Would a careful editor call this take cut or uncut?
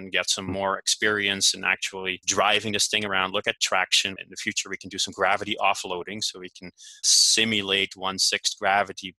cut